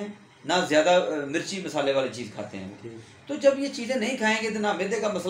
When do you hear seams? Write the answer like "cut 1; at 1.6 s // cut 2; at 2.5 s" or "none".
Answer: none